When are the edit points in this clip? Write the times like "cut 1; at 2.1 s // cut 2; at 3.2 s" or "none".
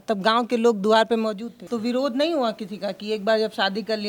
cut 1; at 1.5 s

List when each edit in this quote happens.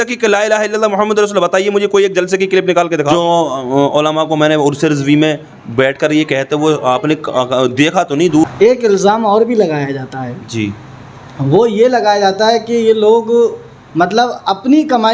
cut 1; at 3.1 s // cut 2; at 8.4 s

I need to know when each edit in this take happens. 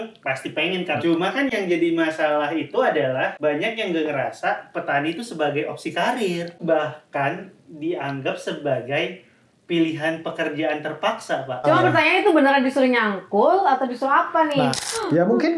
cut 1; at 1.0 s // cut 2; at 3.3 s // cut 3; at 6.6 s // cut 4; at 11.6 s // cut 5; at 14.8 s

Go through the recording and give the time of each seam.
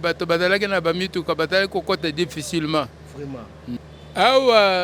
cut 1; at 3.8 s

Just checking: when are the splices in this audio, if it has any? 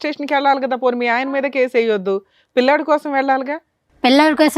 none

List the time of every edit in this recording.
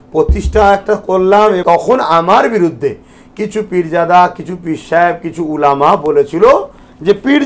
cut 1; at 1.6 s

